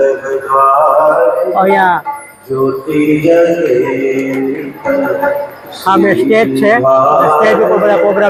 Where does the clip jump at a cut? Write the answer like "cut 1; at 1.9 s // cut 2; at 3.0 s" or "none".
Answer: none